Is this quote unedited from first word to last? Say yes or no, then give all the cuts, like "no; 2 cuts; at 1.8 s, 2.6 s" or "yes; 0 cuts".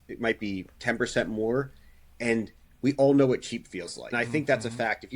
no; 1 cut; at 4.0 s